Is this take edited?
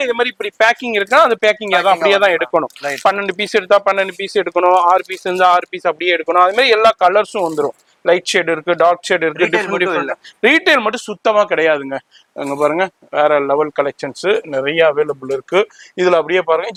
no; 0 cuts

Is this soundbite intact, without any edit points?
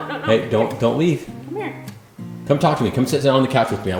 yes; 0 cuts

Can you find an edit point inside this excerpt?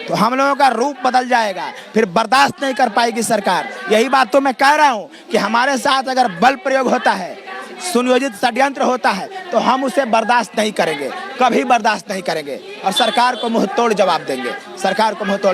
no; 0 cuts

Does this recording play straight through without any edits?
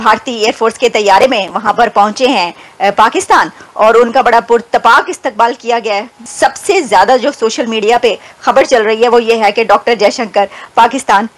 yes; 0 cuts

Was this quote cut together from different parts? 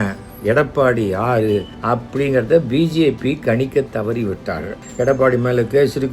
yes; 2 cuts; at 1.7 s, 4.8 s

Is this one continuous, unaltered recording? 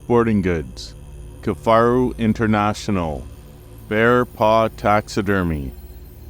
yes; 0 cuts

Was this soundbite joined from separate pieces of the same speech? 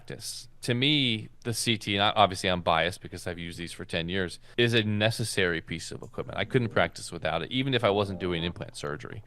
yes; 2 cuts; at 1.3 s, 4.4 s

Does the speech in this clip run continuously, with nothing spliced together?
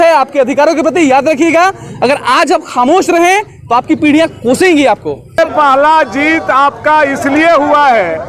no; 1 cut; at 5.4 s

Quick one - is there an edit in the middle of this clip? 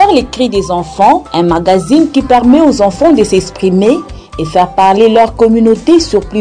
no; 0 cuts

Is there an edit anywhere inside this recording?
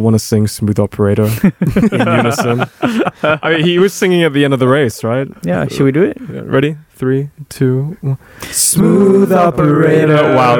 no; 0 cuts

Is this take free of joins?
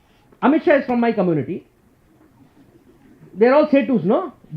yes; 0 cuts

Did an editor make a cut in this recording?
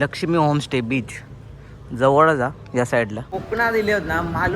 yes; 1 cut; at 3.3 s

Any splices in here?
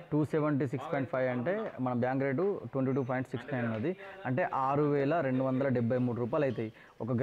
no; 0 cuts

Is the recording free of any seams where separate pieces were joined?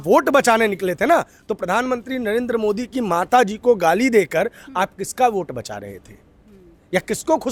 yes; 0 cuts

